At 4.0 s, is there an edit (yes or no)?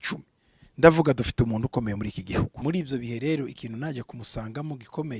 no